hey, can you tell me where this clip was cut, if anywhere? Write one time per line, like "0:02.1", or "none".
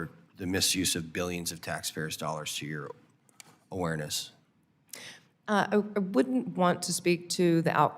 none

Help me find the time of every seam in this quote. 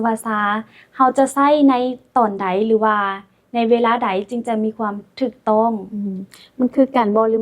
none

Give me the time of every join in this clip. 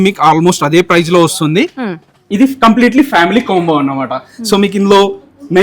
0:02.2

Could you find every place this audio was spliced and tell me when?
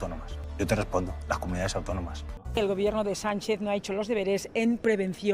0:02.4

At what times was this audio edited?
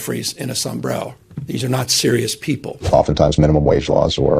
0:01.3
0:02.7

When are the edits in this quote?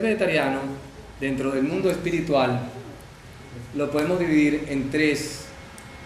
0:04.9

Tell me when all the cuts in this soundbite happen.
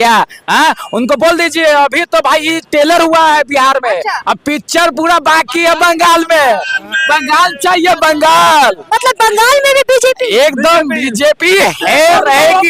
none

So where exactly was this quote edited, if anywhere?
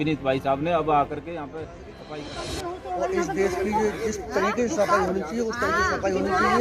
0:02.0

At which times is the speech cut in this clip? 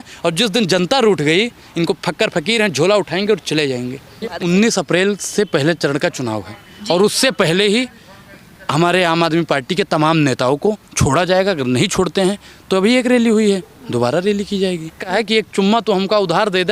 0:04.4
0:15.1

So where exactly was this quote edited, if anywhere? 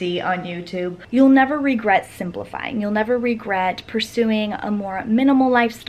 0:01.0

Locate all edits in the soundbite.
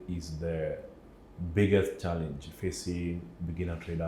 none

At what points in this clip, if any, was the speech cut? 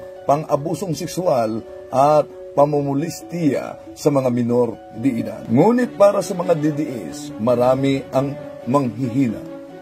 0:05.4

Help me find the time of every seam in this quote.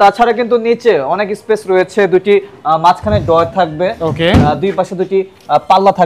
none

